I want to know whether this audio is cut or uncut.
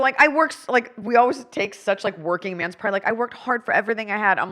cut